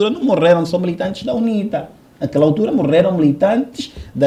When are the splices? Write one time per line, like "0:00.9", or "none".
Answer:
none